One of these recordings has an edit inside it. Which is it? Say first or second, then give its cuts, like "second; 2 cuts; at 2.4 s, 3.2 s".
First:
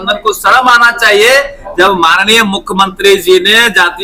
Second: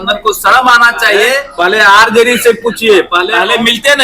second; 2 cuts; at 1.5 s, 3.2 s